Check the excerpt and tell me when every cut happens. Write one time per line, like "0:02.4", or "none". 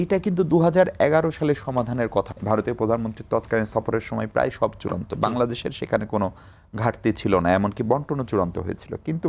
0:02.3